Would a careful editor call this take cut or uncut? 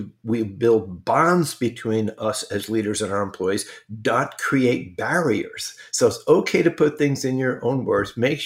uncut